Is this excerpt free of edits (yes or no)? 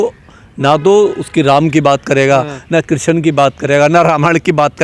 yes